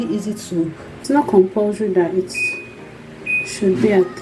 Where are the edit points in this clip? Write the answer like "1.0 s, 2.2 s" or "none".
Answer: 1.0 s